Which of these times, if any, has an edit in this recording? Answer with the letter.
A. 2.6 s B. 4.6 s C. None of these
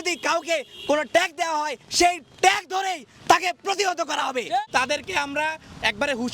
B